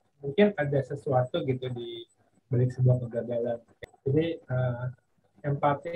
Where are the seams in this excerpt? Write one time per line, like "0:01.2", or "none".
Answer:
0:03.7